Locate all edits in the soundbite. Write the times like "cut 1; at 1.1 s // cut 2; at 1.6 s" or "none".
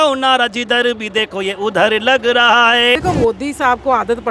cut 1; at 3.0 s